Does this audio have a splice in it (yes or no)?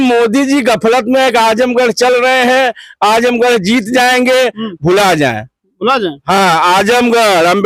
no